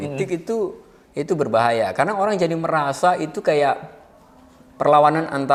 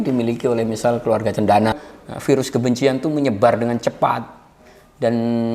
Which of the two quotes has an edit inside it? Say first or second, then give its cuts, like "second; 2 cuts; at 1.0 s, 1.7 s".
second; 1 cut; at 1.8 s